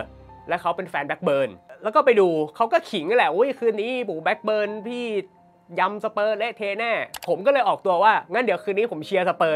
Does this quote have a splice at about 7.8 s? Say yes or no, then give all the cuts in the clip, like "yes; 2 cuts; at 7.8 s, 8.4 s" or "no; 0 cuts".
no; 0 cuts